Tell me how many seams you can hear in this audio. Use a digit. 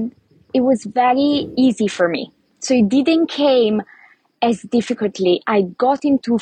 0